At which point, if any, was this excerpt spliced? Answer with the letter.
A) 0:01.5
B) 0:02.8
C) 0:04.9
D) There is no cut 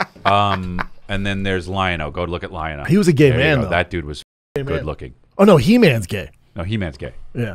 B